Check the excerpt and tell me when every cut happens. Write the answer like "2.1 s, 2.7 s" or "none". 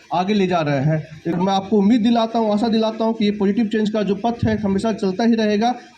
1.4 s